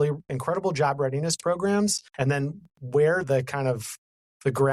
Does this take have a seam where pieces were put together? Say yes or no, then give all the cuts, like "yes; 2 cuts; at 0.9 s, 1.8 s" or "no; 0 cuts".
yes; 1 cut; at 2.1 s